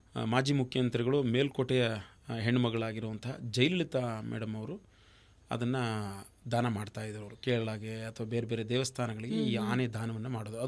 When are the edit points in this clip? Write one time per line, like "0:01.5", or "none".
none